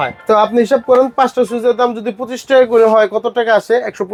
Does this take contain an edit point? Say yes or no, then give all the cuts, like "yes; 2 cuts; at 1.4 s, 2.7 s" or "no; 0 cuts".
no; 0 cuts